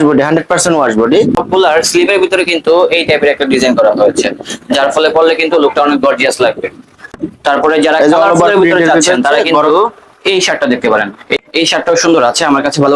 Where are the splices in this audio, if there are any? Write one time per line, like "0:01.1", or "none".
0:01.4
0:07.1
0:11.4